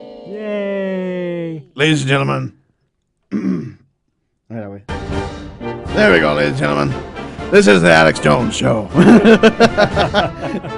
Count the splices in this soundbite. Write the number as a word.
one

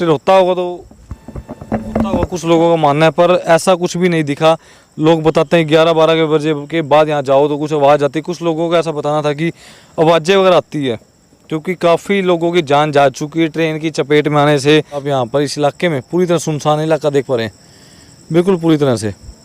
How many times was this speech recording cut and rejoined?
one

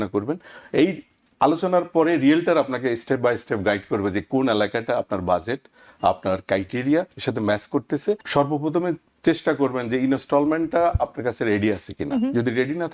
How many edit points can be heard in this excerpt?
one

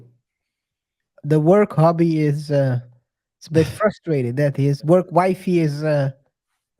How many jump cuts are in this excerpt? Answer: two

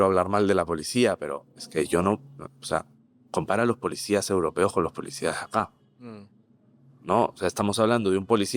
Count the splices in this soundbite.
zero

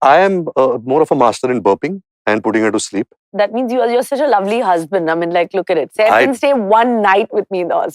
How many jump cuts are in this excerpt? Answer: one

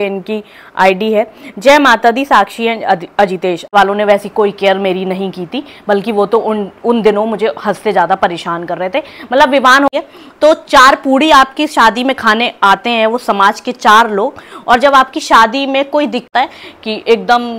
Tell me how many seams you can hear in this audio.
three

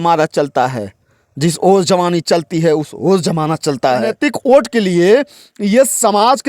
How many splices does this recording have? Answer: one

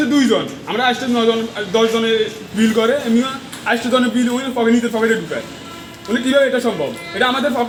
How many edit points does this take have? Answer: zero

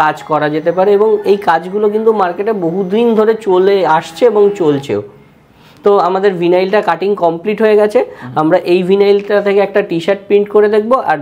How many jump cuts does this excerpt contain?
zero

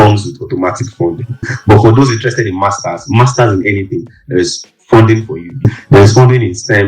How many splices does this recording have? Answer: two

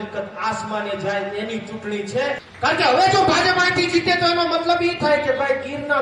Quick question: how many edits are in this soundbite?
one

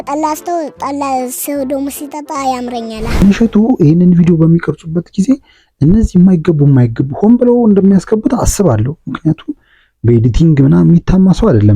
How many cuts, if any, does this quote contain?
one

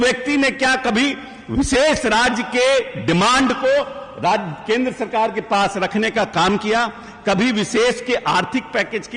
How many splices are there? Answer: zero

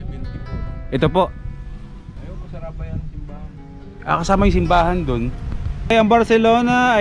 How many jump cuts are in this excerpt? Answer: one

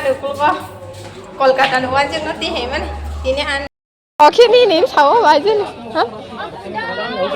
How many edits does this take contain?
one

